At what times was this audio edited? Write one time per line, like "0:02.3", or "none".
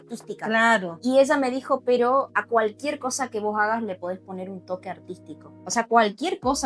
0:02.3
0:05.5

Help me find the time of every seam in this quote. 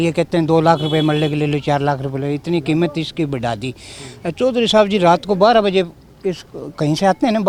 none

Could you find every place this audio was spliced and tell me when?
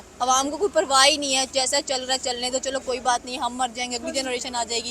none

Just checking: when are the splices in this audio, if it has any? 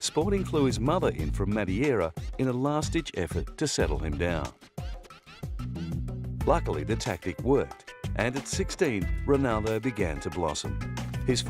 none

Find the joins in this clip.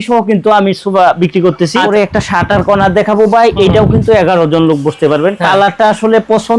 0:01.7

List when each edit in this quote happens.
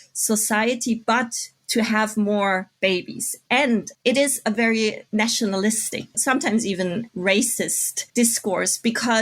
0:03.9
0:05.0
0:06.1

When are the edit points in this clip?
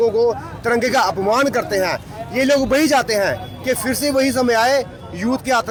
none

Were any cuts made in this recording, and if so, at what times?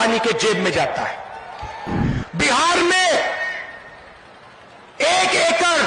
0:02.1

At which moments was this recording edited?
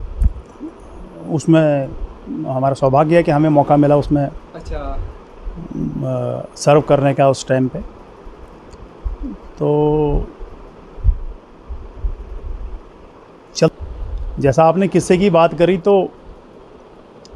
0:13.7

